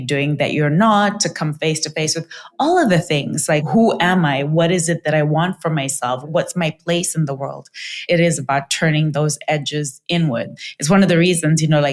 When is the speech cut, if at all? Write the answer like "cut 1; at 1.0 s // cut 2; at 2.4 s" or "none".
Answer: cut 1; at 8.0 s // cut 2; at 10.6 s